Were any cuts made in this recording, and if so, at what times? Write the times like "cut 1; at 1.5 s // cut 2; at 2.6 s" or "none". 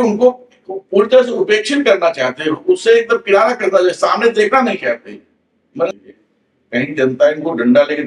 cut 1; at 5.9 s